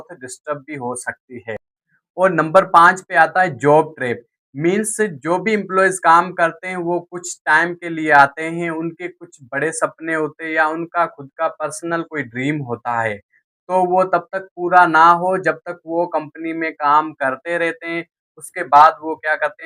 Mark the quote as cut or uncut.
uncut